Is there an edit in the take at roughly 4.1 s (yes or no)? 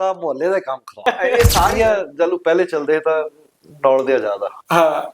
no